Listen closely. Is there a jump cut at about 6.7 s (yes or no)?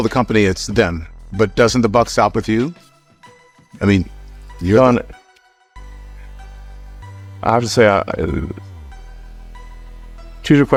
no